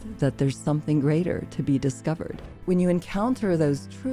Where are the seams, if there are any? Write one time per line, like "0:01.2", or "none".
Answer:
0:02.5